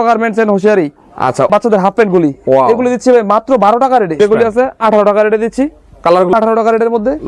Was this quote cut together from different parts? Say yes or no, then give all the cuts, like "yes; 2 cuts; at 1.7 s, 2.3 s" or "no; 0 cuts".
yes; 3 cuts; at 1.5 s, 4.2 s, 6.3 s